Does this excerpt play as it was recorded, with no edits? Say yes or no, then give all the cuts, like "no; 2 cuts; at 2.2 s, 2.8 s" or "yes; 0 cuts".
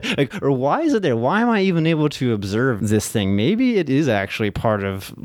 no; 1 cut; at 2.8 s